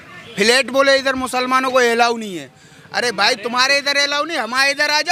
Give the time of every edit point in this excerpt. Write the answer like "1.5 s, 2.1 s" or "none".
none